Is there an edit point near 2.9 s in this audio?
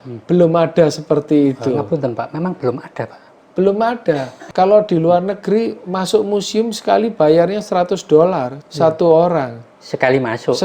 no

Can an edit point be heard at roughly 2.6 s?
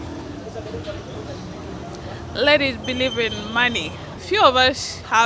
no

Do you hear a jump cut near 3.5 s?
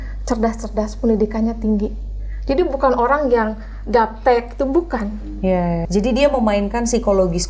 no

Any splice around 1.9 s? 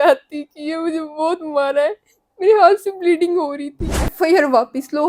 no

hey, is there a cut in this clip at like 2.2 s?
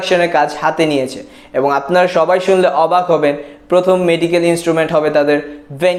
no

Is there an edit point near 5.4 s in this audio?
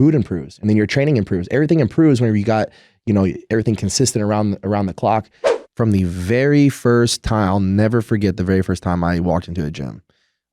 yes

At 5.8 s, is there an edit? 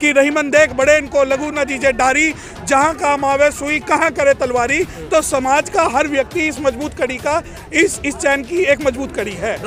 no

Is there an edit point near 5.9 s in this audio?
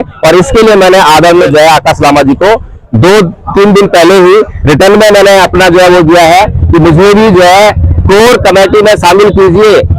no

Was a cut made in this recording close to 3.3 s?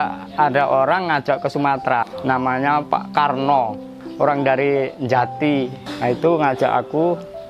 no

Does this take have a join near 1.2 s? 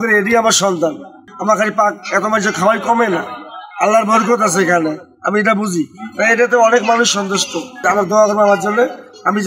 yes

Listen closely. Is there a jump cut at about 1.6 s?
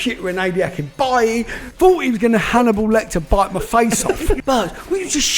yes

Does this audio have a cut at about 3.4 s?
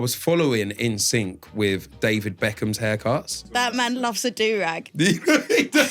yes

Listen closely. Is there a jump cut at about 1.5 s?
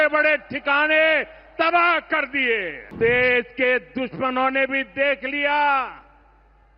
no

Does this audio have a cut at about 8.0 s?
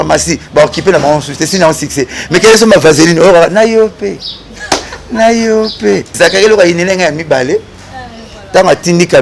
no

